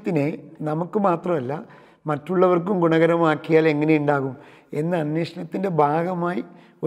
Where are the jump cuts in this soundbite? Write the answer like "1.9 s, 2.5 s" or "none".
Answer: none